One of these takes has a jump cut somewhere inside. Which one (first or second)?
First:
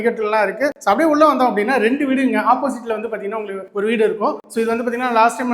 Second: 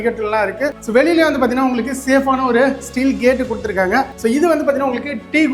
second